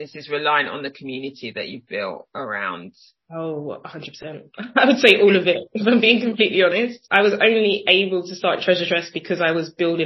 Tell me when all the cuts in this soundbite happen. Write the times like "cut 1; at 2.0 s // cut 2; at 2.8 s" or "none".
cut 1; at 7.0 s